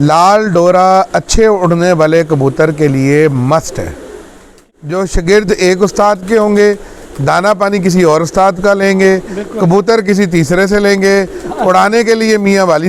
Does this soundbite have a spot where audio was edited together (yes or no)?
yes